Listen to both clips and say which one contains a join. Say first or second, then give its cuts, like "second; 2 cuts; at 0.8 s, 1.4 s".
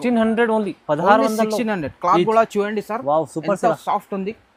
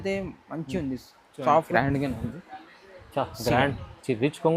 second; 1 cut; at 1.7 s